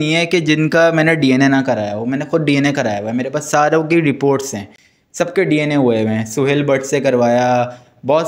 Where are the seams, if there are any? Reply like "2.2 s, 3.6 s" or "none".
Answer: none